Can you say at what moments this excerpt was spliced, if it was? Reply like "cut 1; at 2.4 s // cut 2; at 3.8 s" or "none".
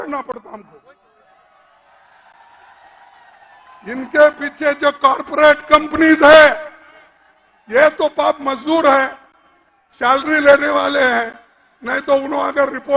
none